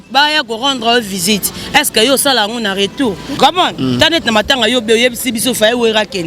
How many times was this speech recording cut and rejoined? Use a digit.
1